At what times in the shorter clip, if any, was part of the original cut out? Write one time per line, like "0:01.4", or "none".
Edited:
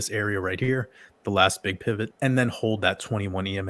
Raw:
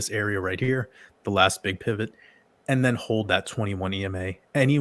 0:02.1